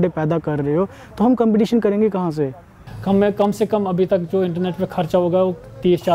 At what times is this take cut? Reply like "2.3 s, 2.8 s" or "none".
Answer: 2.8 s